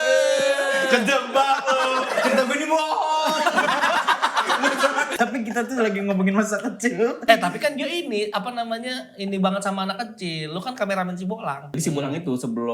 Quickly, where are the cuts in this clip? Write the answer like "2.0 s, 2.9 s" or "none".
5.1 s, 7.2 s, 11.8 s